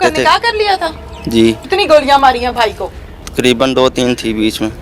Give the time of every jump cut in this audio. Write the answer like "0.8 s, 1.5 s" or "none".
1.6 s